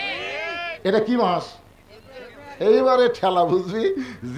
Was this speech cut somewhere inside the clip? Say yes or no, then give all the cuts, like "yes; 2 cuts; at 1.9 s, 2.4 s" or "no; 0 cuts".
no; 0 cuts